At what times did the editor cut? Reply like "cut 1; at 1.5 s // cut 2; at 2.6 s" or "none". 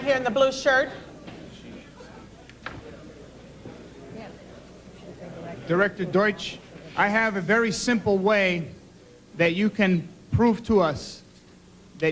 none